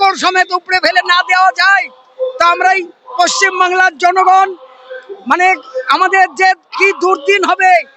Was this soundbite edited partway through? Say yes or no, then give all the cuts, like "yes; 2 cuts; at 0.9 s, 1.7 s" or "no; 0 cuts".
no; 0 cuts